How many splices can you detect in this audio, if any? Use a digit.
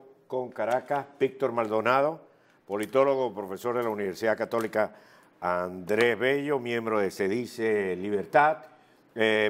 0